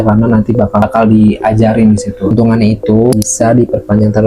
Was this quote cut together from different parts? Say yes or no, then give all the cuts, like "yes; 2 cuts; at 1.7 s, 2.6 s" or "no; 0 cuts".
yes; 1 cut; at 2.3 s